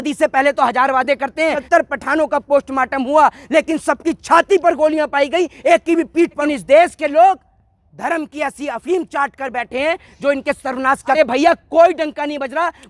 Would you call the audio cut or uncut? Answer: cut